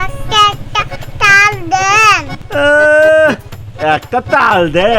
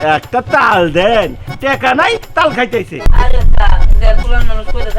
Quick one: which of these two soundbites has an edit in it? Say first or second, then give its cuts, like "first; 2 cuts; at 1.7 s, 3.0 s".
second; 1 cut; at 3.0 s